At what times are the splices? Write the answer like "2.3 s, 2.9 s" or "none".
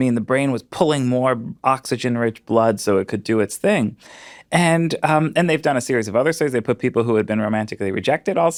none